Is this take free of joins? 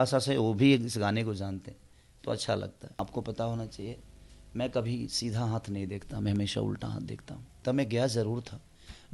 no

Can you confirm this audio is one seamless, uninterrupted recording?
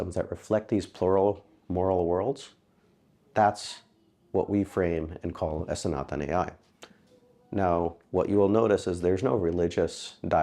yes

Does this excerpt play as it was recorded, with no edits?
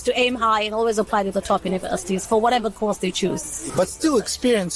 no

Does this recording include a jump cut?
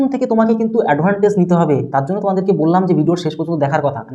no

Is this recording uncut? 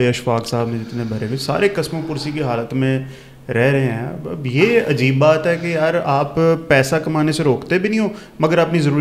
yes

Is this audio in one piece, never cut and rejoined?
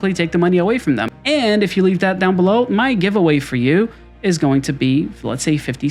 no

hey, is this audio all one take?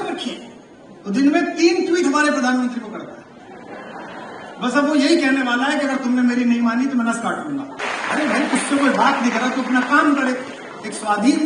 no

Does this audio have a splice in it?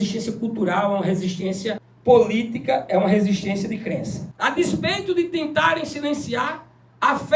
yes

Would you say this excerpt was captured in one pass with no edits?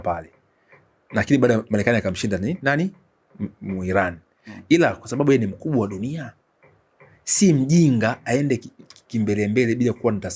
yes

